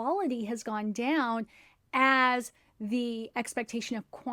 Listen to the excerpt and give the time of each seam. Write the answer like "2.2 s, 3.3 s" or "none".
none